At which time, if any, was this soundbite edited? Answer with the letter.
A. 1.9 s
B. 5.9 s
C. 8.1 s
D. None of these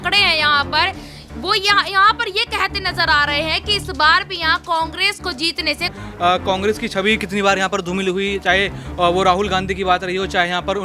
B